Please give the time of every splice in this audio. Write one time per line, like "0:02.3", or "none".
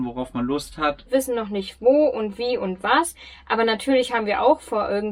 0:01.1

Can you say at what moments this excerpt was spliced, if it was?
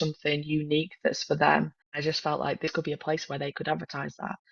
0:01.8

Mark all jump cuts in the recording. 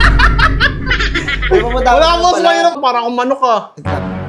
0:02.8

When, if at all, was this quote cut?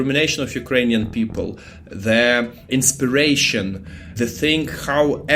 0:02.7
0:04.1

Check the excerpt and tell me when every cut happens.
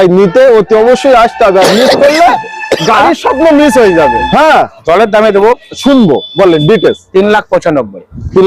0:04.2

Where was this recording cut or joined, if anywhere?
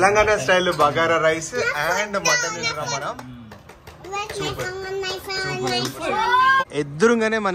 0:06.6

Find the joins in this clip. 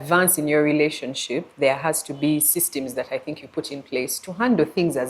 none

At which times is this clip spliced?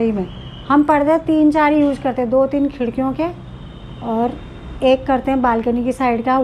none

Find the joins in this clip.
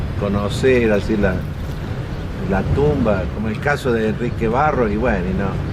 none

